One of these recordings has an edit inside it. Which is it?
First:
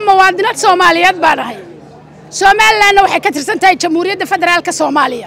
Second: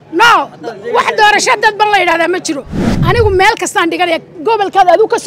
second; 1 cut; at 2.8 s

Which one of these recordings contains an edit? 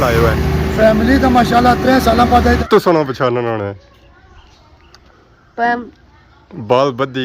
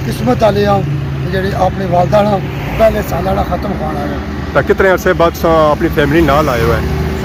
first; 1 cut; at 2.6 s

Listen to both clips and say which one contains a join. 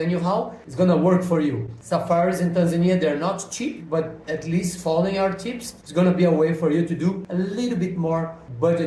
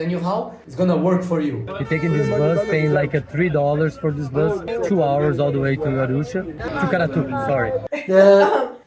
second; 2 cuts; at 1.7 s, 7.8 s

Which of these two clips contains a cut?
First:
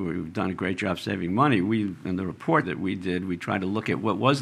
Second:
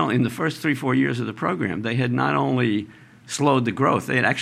first; 1 cut; at 2.7 s

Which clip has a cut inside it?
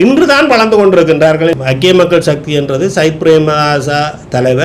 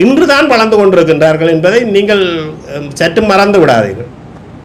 first; 1 cut; at 1.5 s

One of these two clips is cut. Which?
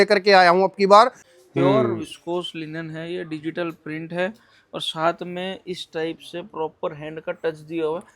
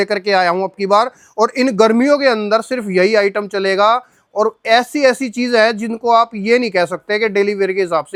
first; 1 cut; at 1.2 s

